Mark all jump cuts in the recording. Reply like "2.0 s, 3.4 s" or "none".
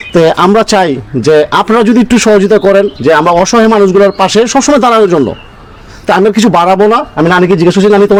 none